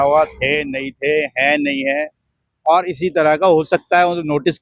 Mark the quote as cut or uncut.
uncut